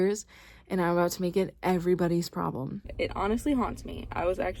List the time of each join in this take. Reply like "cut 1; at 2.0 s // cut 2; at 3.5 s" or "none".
cut 1; at 2.8 s